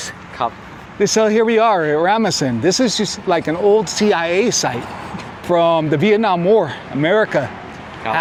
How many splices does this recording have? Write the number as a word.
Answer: zero